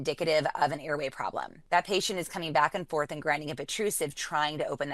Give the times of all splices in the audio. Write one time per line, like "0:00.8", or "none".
0:01.5